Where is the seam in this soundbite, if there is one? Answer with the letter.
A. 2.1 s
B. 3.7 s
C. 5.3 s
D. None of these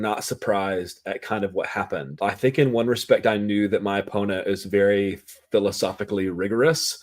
A